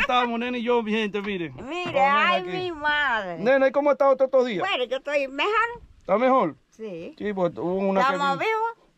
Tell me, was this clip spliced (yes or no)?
no